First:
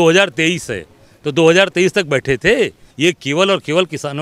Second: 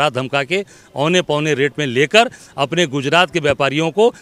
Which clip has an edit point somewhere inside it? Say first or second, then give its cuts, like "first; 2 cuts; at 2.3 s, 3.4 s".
first; 1 cut; at 2.8 s